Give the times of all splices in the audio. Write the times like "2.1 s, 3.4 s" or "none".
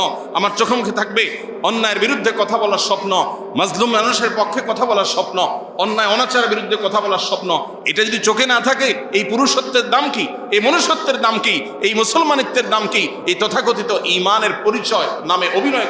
none